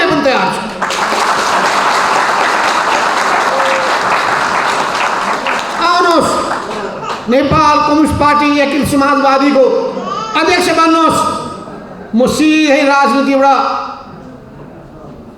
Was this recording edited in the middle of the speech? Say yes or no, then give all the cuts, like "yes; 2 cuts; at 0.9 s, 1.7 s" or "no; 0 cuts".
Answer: no; 0 cuts